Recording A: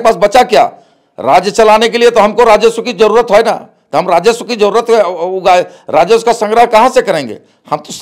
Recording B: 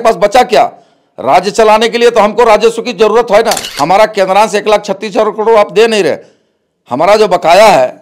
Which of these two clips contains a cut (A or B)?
B